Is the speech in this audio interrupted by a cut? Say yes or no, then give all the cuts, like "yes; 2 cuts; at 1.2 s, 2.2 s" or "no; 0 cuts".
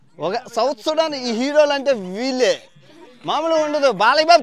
no; 0 cuts